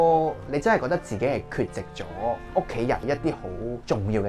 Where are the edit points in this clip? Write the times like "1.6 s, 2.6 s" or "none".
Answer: 3.0 s